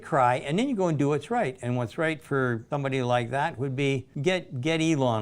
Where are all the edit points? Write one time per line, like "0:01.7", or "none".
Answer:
0:02.6
0:04.1